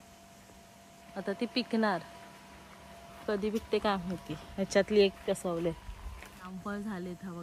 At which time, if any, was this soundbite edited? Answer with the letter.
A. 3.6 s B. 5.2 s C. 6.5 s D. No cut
C